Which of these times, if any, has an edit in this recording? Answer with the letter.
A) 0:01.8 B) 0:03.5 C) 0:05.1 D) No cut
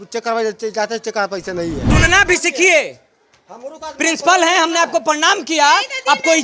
A